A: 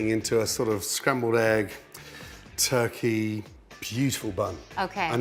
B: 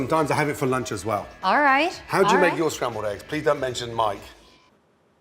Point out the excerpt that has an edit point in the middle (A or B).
B